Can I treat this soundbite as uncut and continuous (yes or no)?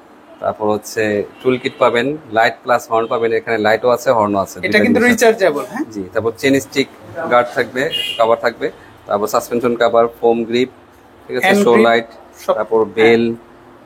yes